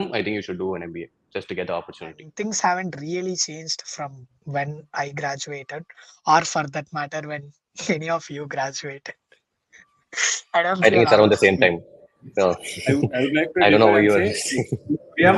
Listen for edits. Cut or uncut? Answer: cut